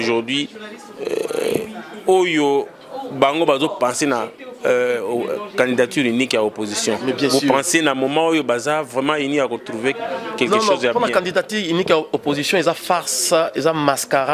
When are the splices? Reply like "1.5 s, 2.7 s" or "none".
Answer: none